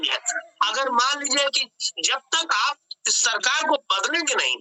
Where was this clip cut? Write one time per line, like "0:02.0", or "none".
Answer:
none

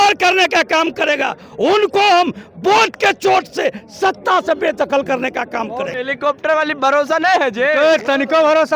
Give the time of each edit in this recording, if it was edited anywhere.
0:05.9

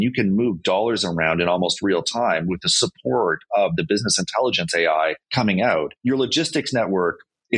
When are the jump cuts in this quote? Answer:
0:05.2
0:05.9

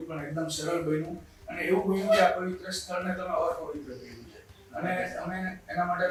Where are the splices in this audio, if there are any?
none

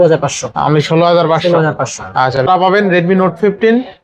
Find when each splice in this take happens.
0:02.4

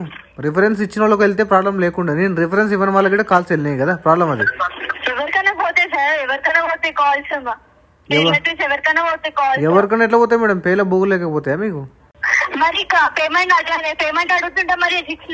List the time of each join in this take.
0:12.1

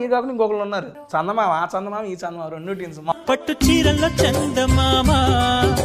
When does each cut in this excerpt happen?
0:01.0
0:03.1

